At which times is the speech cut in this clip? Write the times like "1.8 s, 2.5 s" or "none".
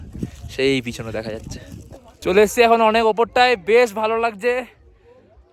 2.2 s